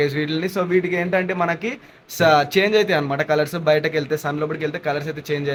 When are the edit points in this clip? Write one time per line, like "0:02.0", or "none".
none